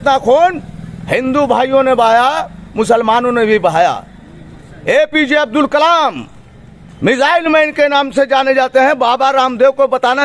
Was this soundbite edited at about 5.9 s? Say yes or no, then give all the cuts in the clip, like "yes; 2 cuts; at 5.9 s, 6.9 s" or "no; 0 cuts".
no; 0 cuts